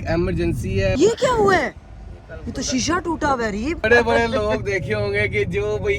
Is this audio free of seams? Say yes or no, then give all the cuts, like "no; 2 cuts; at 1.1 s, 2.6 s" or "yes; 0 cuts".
no; 2 cuts; at 0.9 s, 3.8 s